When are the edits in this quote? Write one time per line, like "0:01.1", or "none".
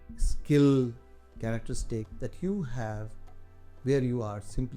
0:02.1